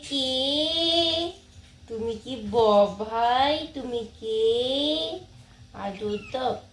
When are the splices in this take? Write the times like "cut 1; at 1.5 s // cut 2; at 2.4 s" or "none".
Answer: none